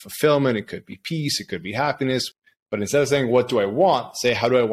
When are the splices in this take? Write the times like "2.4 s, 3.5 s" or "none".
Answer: 2.3 s